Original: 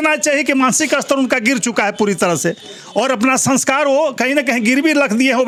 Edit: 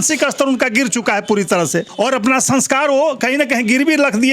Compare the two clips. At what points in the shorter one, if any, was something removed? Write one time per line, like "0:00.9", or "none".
0:01.9